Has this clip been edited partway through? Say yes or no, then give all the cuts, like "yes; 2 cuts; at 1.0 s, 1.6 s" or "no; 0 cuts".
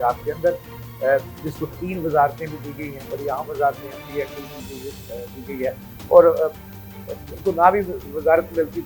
no; 0 cuts